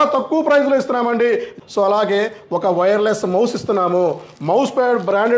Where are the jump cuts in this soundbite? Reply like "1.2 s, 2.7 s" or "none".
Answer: 1.6 s